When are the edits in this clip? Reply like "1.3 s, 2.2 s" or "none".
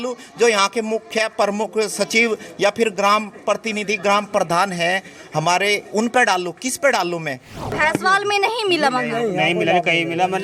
7.8 s